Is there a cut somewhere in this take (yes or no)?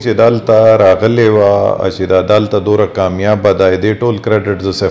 no